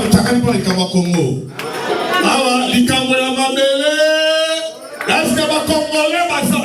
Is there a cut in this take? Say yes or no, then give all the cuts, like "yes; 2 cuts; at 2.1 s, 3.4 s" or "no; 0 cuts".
no; 0 cuts